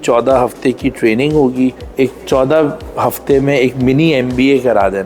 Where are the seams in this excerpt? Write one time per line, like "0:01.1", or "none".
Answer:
0:01.8